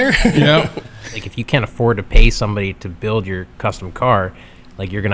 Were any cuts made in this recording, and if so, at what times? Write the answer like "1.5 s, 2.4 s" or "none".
1.2 s